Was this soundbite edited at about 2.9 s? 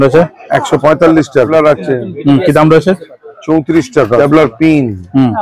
no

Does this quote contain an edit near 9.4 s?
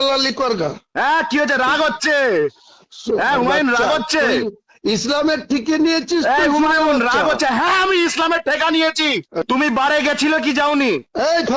yes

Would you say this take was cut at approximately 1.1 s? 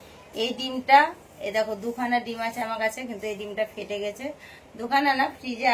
no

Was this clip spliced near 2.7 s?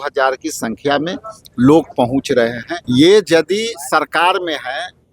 yes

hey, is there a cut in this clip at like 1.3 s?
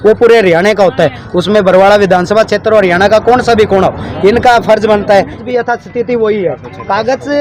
no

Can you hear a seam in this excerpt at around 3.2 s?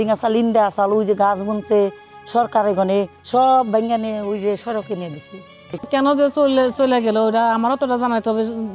no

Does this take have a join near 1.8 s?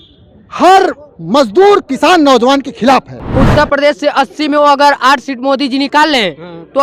no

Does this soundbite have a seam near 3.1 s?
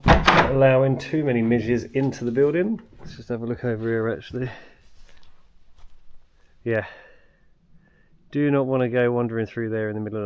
yes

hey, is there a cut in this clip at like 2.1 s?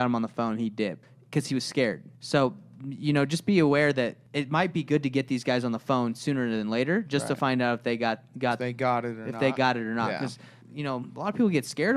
yes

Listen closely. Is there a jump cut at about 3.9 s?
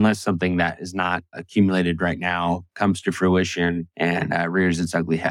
yes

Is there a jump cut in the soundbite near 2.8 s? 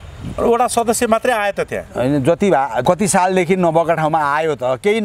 yes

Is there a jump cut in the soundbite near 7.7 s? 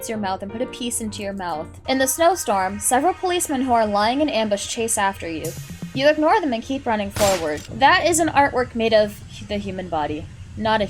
yes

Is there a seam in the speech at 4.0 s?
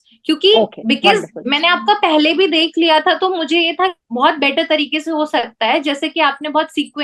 yes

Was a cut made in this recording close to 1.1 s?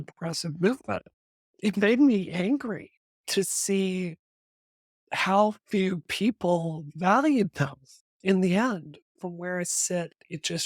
yes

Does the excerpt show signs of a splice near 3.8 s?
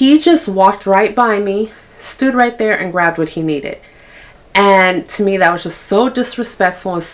no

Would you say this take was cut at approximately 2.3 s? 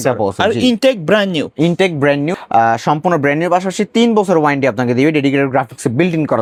no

